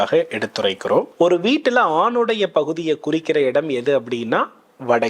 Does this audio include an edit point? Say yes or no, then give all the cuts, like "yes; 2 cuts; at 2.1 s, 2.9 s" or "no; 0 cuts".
yes; 1 cut; at 1.1 s